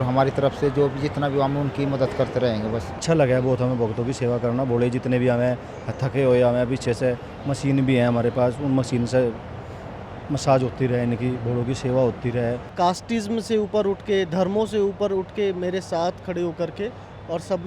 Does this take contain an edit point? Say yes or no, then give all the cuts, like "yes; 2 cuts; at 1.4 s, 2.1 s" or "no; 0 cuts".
yes; 2 cuts; at 3.0 s, 12.6 s